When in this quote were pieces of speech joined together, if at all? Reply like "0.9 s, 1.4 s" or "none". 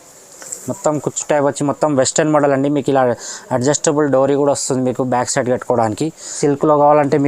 6.3 s

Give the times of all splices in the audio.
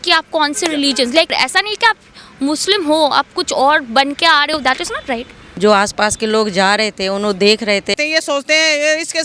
1.3 s, 5.1 s, 7.9 s

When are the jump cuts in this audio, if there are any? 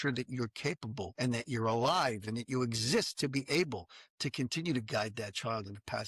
1.1 s

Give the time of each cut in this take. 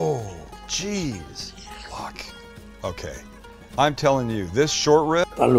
none

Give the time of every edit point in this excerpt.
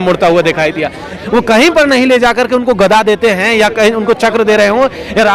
1.2 s

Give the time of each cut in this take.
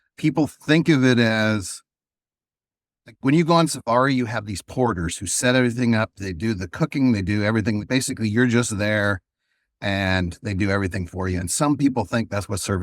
6.2 s, 7.8 s

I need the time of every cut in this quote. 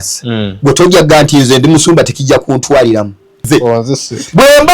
3.4 s

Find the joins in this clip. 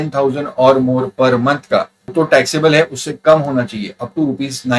2.0 s

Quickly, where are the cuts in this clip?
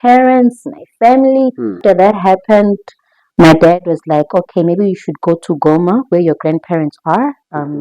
1.7 s

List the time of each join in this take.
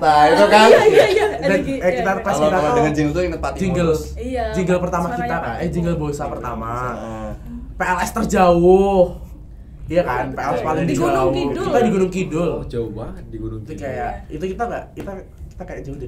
none

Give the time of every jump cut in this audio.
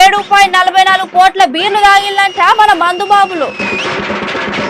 none

